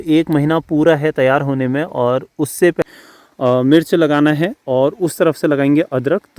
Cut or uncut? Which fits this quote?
cut